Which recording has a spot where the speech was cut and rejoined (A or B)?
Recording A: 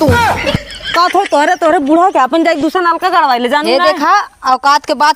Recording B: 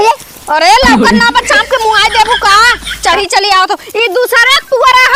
A